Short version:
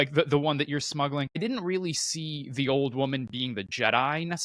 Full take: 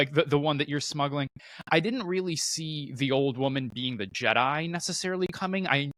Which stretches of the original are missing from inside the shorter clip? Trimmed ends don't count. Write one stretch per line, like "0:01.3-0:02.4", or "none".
0:01.4-0:01.8